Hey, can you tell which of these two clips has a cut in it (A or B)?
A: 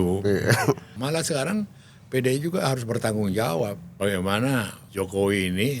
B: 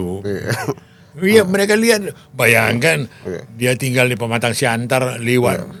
A